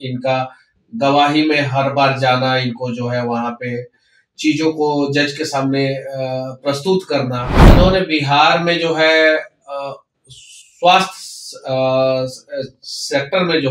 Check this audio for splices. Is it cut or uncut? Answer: cut